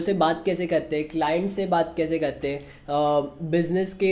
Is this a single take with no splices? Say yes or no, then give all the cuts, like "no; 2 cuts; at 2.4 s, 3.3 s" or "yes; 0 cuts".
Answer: yes; 0 cuts